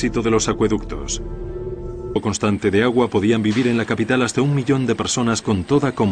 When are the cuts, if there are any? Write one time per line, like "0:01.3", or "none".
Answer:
none